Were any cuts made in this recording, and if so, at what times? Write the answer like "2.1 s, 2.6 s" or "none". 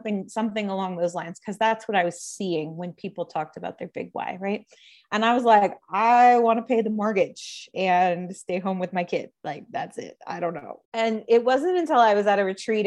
10.7 s